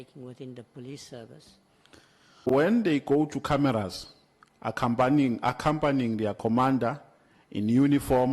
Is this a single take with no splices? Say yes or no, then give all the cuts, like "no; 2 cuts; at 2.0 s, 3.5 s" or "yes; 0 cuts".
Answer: no; 1 cut; at 2.5 s